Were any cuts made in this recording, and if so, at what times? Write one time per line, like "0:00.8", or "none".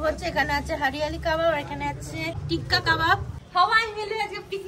0:03.3